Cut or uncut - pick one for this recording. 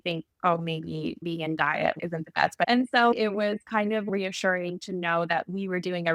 cut